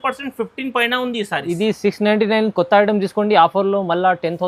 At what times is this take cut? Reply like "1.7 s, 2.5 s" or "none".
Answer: none